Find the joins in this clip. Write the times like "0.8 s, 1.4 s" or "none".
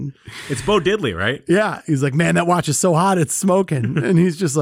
1.8 s